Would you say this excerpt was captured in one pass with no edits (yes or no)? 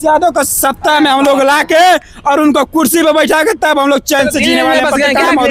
yes